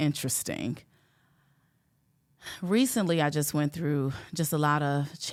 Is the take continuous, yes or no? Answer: yes